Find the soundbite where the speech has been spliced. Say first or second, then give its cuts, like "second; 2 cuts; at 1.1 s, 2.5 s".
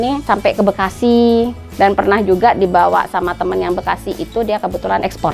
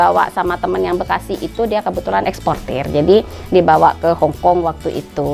first; 1 cut; at 1.6 s